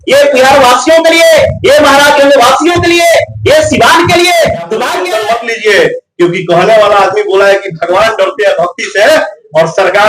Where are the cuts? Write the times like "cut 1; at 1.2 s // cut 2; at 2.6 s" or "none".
cut 1; at 4.9 s